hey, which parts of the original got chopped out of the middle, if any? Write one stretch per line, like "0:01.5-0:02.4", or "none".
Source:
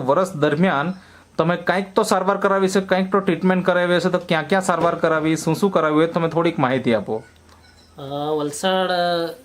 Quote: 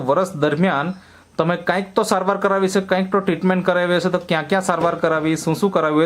none